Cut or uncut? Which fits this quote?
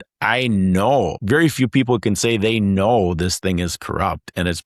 cut